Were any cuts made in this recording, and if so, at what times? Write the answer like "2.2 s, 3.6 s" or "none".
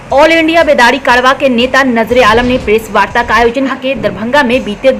none